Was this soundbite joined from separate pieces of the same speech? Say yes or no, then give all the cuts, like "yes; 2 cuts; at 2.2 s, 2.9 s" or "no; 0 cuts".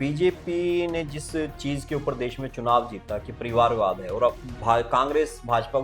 no; 0 cuts